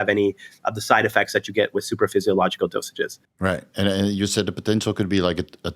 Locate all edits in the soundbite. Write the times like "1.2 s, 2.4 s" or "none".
3.2 s